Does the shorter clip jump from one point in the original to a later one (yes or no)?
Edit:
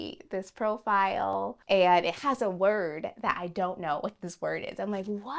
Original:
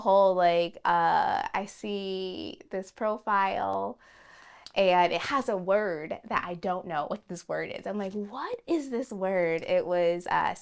yes